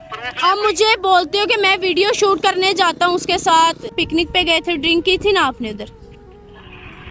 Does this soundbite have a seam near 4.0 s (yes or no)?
yes